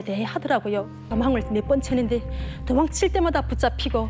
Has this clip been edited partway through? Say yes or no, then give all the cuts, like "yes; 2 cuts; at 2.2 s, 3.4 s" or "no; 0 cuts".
yes; 1 cut; at 1.0 s